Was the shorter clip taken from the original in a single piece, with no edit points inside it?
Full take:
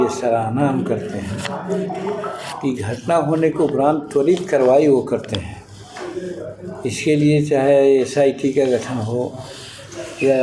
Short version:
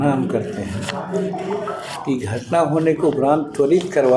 yes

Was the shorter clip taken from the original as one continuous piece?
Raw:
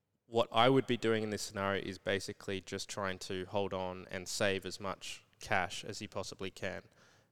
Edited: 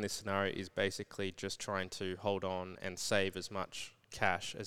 yes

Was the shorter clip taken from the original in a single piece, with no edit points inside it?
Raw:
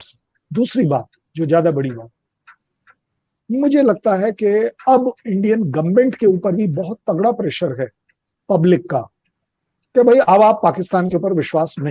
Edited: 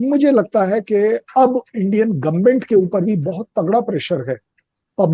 yes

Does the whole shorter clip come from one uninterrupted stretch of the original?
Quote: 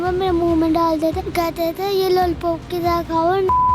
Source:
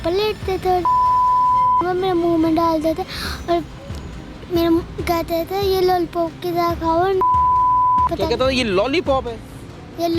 no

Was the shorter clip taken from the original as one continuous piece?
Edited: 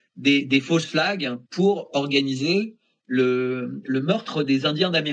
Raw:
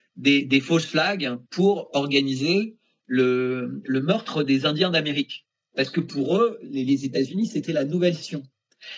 yes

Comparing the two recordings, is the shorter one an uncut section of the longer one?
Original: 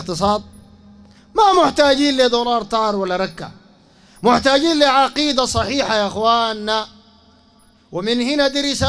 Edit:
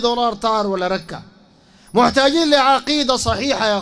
yes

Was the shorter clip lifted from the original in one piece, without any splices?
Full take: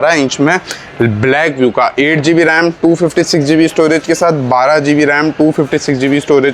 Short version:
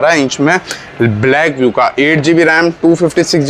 yes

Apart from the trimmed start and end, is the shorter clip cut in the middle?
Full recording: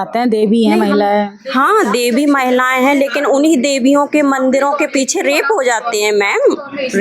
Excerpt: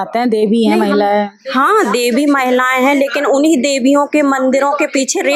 no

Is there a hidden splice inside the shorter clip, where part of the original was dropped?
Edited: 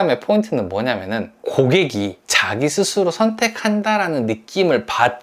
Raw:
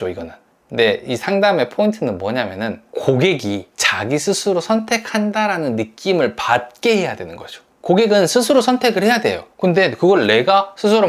no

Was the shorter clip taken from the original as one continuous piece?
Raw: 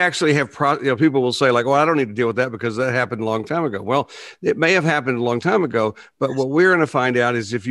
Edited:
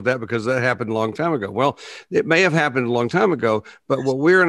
yes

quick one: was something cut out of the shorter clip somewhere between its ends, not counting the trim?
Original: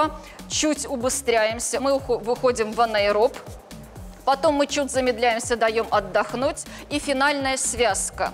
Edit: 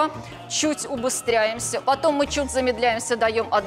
yes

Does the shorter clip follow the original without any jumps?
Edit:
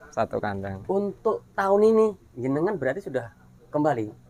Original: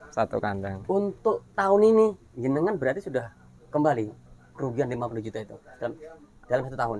yes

